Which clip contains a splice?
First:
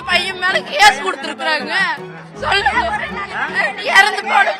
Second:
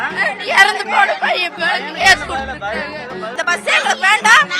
second; 1 cut; at 3.3 s

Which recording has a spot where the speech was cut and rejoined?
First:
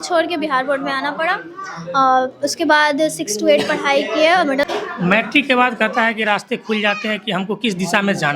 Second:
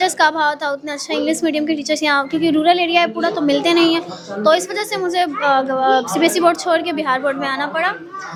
first; 1 cut; at 4.7 s

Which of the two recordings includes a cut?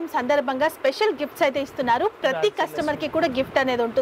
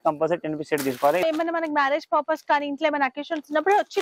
second; 1 cut; at 1.2 s

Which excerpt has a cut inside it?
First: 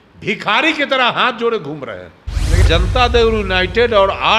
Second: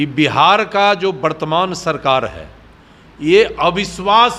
first; 1 cut; at 2.6 s

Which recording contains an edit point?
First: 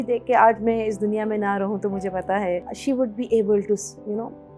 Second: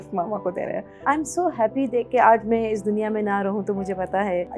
second; 1 cut; at 0.9 s

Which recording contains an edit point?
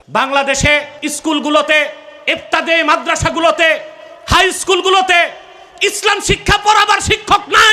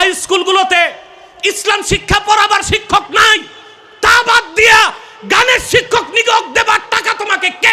first; 1 cut; at 1.0 s

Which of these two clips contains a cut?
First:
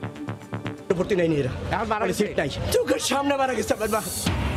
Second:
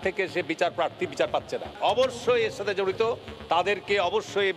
second; 1 cut; at 1.7 s

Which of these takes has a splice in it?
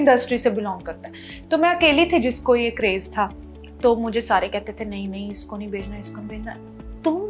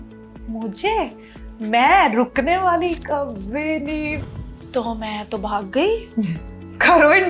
second; 1 cut; at 4.2 s

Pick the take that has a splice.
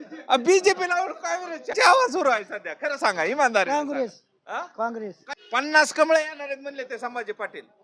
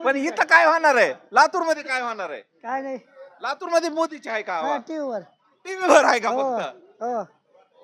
first; 2 cuts; at 1.6 s, 5.2 s

